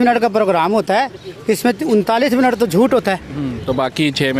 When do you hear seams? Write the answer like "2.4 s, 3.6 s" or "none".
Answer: none

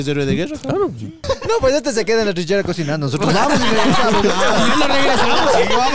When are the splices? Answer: 1.2 s

